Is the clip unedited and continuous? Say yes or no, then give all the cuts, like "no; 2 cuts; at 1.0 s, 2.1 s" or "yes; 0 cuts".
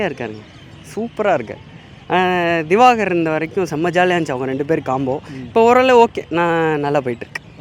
yes; 0 cuts